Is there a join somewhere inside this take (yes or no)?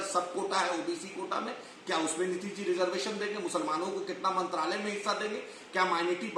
no